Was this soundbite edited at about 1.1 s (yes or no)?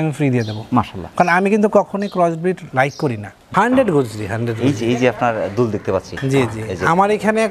no